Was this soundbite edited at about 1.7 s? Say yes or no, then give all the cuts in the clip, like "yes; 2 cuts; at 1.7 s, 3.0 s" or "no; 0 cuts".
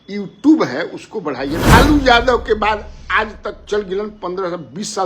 yes; 1 cut; at 1.7 s